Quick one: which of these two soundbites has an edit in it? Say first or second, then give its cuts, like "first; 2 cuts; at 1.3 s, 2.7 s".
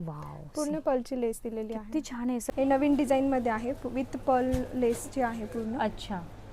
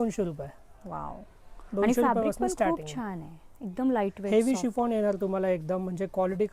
first; 1 cut; at 2.4 s